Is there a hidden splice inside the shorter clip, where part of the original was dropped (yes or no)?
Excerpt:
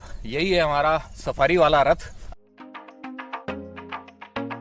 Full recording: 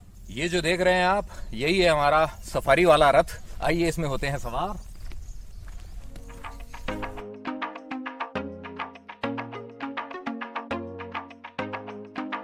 yes